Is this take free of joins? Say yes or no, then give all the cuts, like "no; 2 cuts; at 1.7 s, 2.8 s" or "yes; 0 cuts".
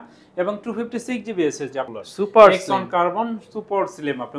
no; 1 cut; at 1.9 s